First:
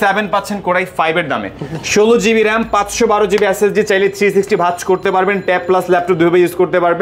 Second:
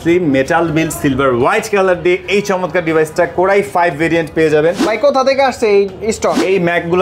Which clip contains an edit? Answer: second; 1 cut; at 4.8 s

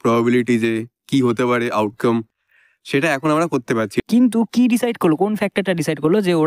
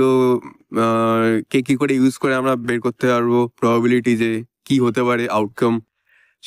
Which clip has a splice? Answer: first; 1 cut; at 4.0 s

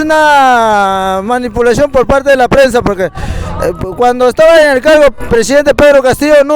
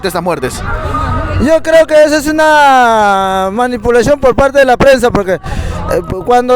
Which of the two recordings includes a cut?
second; 1 cut; at 1.3 s

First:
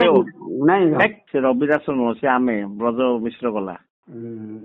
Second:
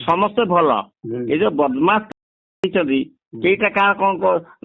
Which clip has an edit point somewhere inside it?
first; 1 cut; at 1.2 s

